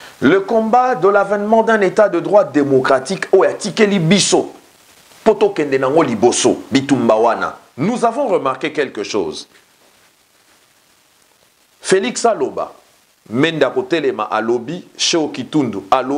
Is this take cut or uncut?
cut